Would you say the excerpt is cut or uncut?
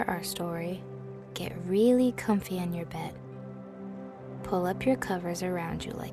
cut